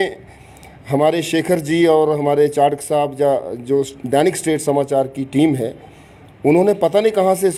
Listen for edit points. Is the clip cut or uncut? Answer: uncut